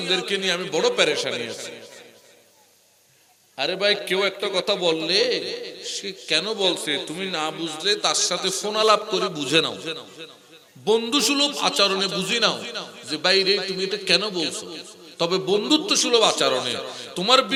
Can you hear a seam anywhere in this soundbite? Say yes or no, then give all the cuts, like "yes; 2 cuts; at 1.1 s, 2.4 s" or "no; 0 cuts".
no; 0 cuts